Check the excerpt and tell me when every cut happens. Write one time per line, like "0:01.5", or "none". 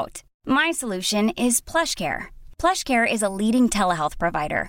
none